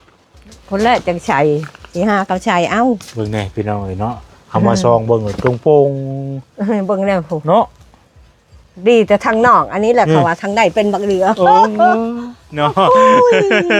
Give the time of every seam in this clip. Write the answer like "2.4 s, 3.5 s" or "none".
none

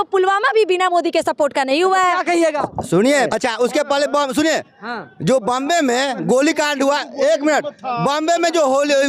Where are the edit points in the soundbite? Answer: none

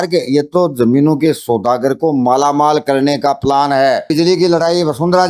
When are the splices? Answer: 4.1 s

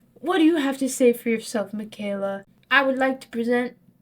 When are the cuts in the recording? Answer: 2.5 s

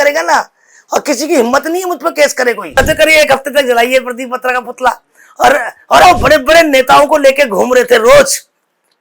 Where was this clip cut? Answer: 2.8 s, 6.0 s

